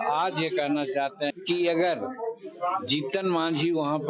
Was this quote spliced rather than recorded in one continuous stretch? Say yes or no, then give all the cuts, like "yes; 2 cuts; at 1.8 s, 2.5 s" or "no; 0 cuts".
yes; 1 cut; at 1.3 s